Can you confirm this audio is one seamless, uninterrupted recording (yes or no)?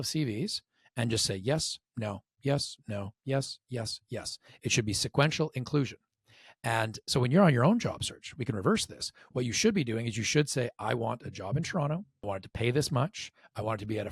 no